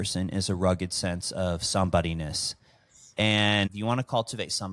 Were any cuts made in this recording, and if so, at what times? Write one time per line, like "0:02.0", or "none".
0:03.7